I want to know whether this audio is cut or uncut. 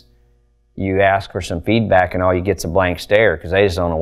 uncut